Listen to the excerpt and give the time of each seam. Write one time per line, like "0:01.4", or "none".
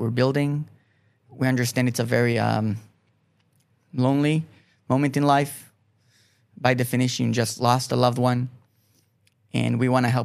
none